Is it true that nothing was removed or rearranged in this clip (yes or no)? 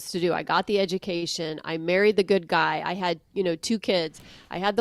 yes